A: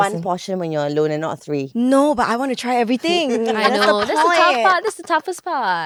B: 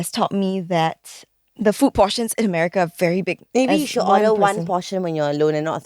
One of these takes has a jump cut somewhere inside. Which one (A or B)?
B